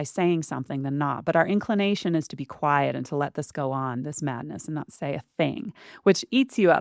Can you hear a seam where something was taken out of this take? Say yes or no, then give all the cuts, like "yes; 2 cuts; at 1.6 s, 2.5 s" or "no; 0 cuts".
no; 0 cuts